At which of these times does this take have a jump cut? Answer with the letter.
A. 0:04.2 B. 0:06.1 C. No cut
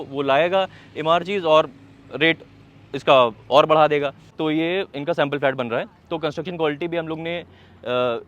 A